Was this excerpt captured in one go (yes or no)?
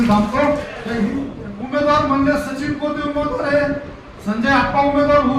no